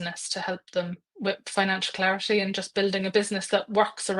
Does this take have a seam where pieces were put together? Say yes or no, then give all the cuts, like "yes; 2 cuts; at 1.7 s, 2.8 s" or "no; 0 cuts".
yes; 1 cut; at 1.1 s